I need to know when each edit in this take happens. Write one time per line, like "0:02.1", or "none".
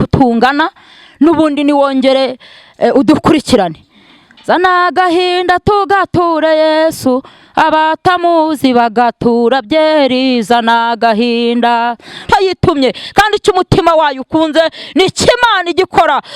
0:12.2